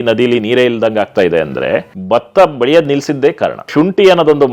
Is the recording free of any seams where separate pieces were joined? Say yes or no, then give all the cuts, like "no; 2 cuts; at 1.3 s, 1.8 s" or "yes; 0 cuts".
no; 2 cuts; at 1.9 s, 3.7 s